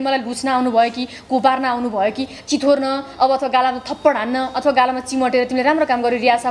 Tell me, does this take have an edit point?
no; 0 cuts

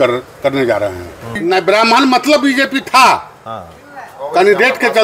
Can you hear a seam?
yes; 1 cut; at 1.3 s

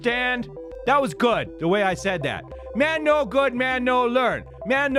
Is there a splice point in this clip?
no; 0 cuts

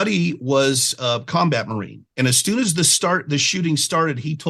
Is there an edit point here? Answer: no; 0 cuts

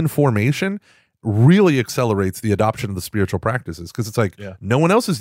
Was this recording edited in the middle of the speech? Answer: yes; 1 cut; at 1.3 s

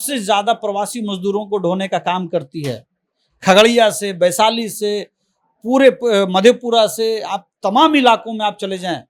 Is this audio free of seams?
yes; 0 cuts

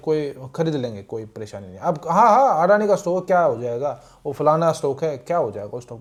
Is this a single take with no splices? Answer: yes; 0 cuts

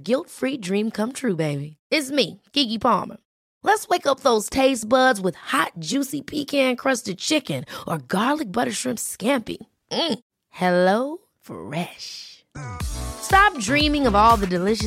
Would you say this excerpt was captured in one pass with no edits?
yes; 0 cuts

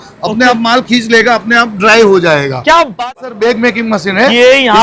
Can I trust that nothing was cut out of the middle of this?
no; 1 cut; at 2.9 s

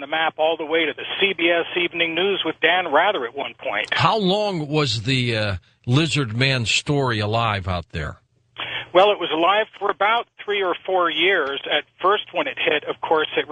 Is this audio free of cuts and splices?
yes; 0 cuts

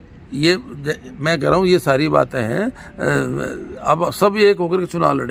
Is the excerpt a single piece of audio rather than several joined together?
yes; 0 cuts

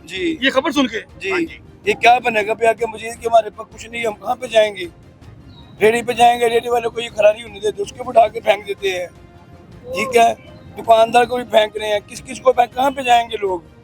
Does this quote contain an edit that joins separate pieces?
no; 0 cuts

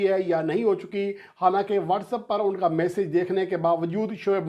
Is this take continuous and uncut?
yes; 0 cuts

